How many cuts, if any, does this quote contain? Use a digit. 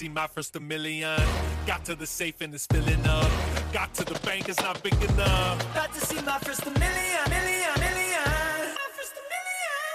0